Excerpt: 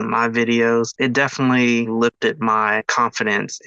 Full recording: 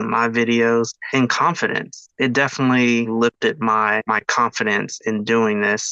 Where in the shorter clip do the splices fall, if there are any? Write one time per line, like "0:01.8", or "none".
0:00.9
0:02.8